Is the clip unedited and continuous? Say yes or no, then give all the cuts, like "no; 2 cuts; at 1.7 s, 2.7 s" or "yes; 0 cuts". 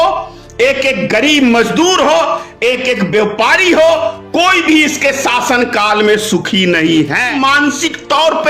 no; 1 cut; at 7.4 s